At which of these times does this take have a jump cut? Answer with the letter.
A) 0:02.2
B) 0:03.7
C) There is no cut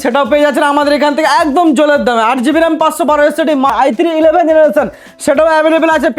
B